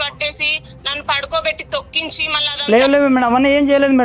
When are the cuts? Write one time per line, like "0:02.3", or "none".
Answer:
0:02.3

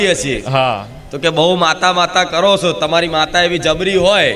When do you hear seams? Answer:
none

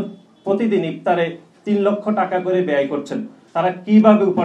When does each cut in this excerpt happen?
0:03.4

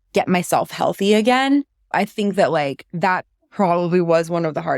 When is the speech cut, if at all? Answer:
0:01.8

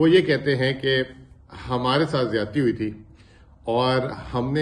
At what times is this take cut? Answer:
none

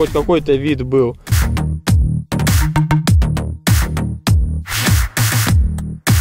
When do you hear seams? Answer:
none

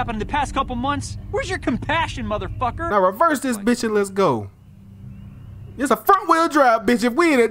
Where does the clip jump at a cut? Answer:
0:02.9

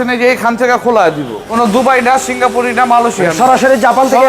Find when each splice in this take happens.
0:01.4

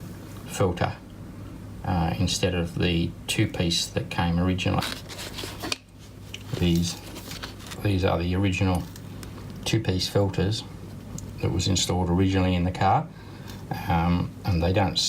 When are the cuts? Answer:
0:04.8

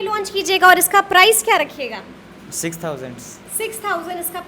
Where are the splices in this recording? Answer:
none

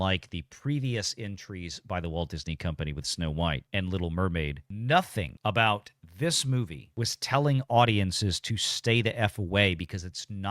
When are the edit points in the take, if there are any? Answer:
0:05.2
0:06.8

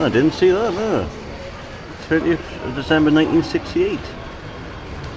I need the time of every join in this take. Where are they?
none

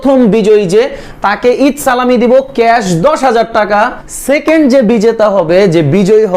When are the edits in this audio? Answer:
0:04.1

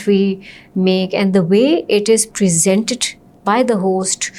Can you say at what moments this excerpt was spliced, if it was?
none

